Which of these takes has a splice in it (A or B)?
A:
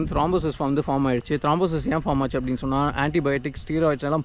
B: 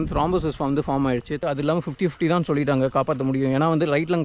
B